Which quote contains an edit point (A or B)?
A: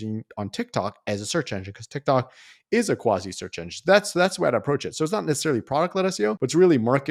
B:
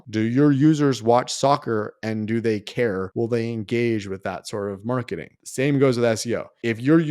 B